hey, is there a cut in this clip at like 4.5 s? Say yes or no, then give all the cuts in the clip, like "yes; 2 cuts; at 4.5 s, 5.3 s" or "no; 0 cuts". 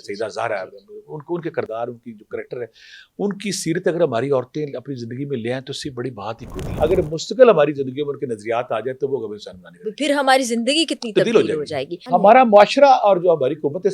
no; 2 cuts; at 6.6 s, 12.0 s